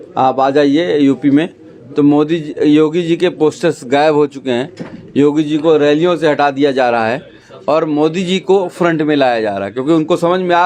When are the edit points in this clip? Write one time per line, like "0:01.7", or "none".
none